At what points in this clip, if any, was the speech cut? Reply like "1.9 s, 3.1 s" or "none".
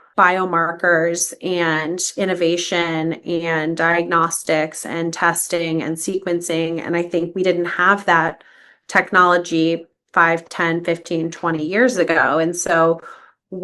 none